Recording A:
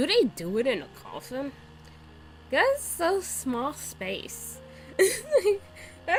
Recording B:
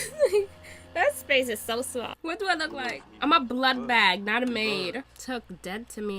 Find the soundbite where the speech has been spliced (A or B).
B